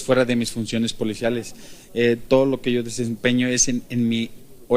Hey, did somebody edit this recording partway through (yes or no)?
no